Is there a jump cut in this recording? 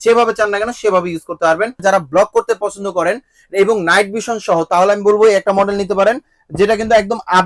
yes; 1 cut; at 1.8 s

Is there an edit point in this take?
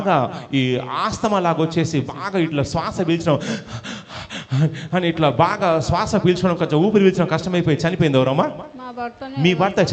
no; 0 cuts

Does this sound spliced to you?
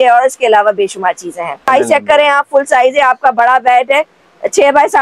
yes; 1 cut; at 1.7 s

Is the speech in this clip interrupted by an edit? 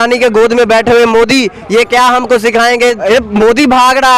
yes; 1 cut; at 3.0 s

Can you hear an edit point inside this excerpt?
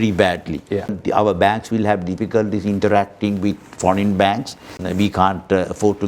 yes; 2 cuts; at 1.0 s, 4.8 s

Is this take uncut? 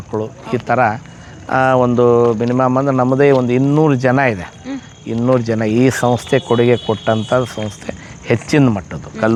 yes; 0 cuts

